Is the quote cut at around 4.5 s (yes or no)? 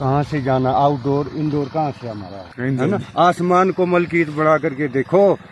no